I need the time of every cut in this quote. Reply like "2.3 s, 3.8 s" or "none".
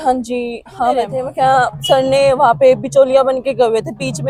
none